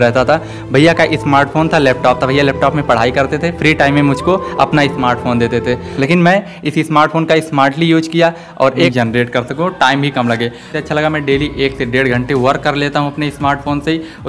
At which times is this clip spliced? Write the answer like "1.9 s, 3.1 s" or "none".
5.9 s, 8.9 s, 10.7 s